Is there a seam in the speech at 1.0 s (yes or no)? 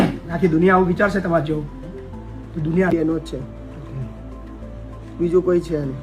no